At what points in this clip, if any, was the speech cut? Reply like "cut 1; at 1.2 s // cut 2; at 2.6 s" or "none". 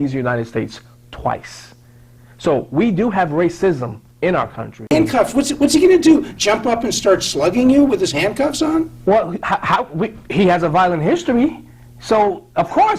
cut 1; at 4.9 s

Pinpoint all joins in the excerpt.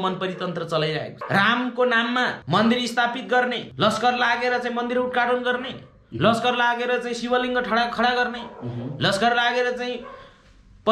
cut 1; at 1.2 s // cut 2; at 2.4 s // cut 3; at 3.7 s

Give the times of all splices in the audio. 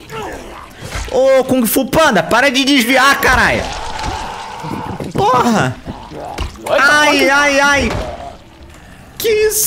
none

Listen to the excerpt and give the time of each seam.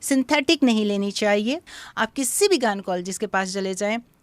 cut 1; at 1.6 s

